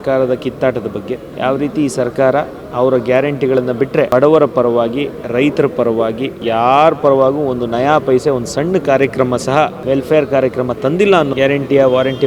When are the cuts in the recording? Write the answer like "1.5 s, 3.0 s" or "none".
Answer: 1.3 s, 4.1 s, 6.4 s, 9.8 s, 11.3 s